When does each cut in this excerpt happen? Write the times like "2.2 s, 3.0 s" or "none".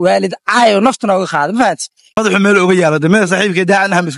2.2 s

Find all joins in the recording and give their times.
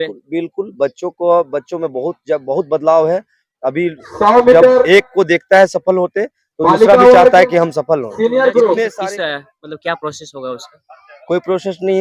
9.0 s

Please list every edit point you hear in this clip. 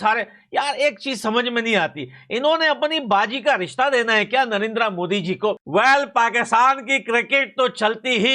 5.6 s

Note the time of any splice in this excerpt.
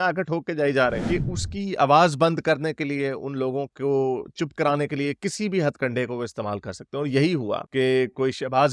1.0 s

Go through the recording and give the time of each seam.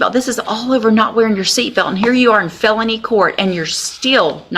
none

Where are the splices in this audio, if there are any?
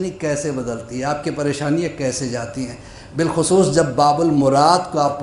none

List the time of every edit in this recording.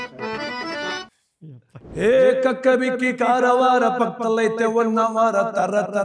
1.2 s

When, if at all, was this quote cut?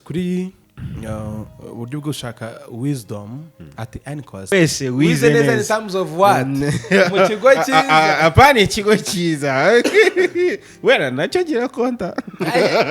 4.5 s

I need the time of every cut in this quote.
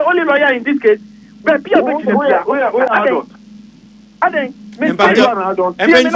none

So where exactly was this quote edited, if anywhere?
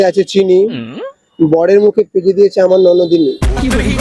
none

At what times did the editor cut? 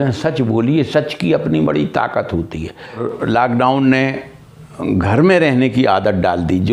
3.0 s

